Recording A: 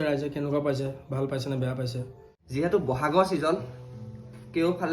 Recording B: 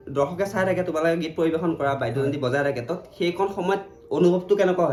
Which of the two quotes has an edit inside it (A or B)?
A